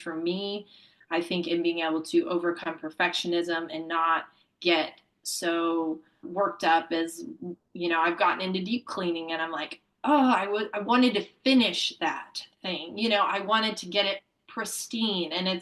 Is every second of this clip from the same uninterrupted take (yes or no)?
yes